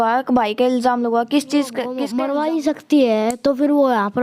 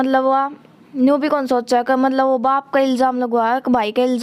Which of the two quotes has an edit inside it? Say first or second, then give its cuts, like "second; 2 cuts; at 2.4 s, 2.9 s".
first; 1 cut; at 2.0 s